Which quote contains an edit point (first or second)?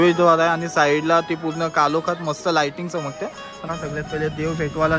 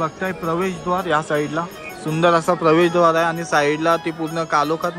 first